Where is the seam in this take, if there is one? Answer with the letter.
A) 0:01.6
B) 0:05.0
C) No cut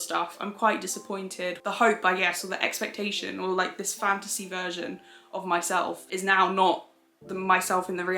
A